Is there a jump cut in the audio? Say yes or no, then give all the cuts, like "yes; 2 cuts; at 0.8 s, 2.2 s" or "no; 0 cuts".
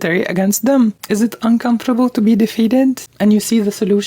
yes; 2 cuts; at 1.0 s, 3.1 s